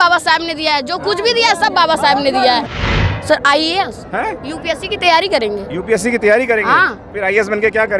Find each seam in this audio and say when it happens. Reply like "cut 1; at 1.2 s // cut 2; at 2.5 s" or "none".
cut 1; at 2.7 s